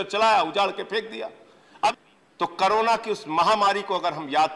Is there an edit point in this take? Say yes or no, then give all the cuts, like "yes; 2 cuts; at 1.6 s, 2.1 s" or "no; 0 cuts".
yes; 1 cut; at 1.9 s